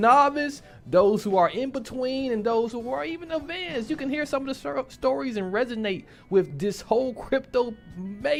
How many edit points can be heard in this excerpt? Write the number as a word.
zero